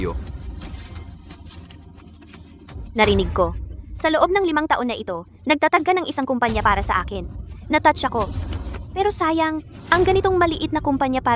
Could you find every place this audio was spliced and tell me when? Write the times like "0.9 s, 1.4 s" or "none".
none